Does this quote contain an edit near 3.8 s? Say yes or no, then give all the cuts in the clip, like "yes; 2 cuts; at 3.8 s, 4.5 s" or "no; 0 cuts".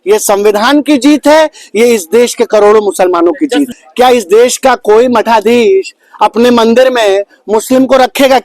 yes; 1 cut; at 3.8 s